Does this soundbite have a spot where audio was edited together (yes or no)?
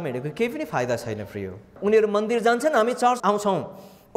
yes